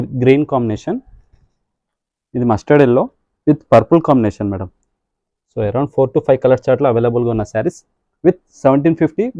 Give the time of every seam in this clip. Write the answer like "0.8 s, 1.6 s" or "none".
none